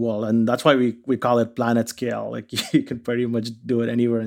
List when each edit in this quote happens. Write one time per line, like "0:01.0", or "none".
none